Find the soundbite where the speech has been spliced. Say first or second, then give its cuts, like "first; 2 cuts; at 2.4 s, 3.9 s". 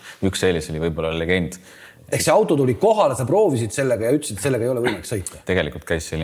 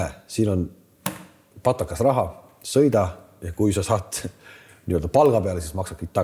first; 2 cuts; at 1.9 s, 5.3 s